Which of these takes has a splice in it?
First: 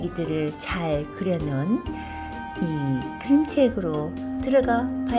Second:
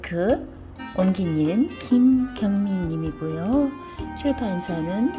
first; 1 cut; at 4.3 s

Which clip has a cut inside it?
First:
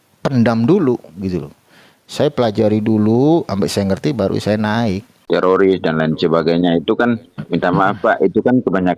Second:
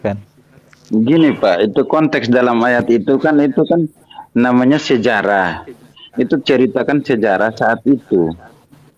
first; 1 cut; at 5.1 s

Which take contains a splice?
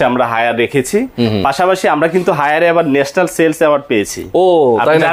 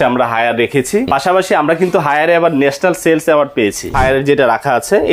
second; 2 cuts; at 1.1 s, 3.9 s

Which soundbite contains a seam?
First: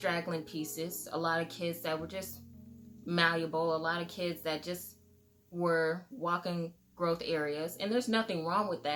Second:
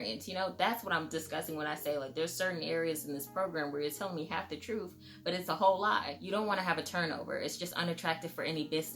second; 1 cut; at 6.2 s

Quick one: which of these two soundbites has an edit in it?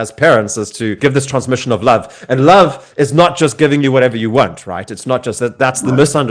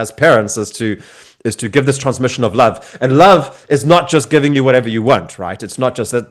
first; 1 cut; at 1.0 s

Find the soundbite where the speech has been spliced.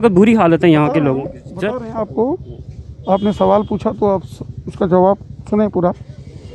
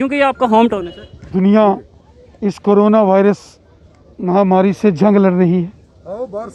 second; 1 cut; at 1.3 s

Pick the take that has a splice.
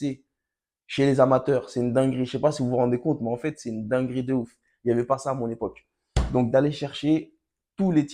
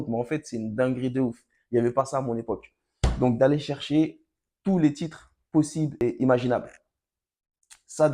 second; 1 cut; at 6.0 s

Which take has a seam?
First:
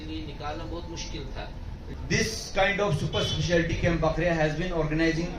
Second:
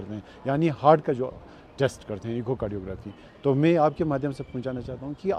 first; 1 cut; at 1.9 s

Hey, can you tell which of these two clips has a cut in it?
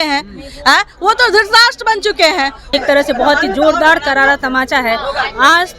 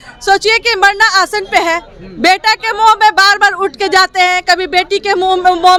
first; 1 cut; at 2.7 s

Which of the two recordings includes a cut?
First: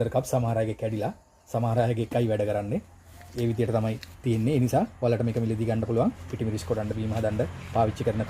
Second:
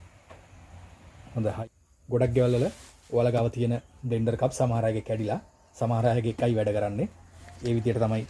second; 1 cut; at 1.6 s

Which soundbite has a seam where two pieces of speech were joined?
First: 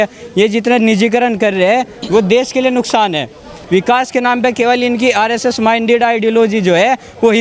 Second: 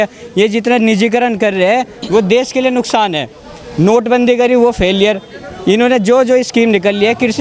first; 1 cut; at 3.6 s

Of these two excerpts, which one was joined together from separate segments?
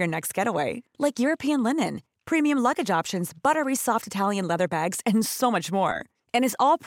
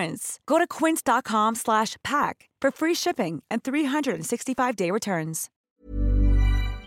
second; 1 cut; at 5.6 s

